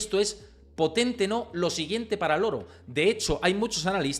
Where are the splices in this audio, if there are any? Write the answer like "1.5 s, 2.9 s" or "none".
none